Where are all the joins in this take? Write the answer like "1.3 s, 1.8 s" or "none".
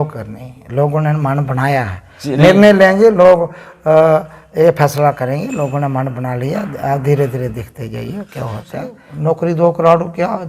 9.0 s